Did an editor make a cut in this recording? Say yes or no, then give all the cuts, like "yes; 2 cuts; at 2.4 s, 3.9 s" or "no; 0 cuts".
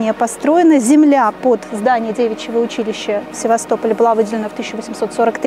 no; 0 cuts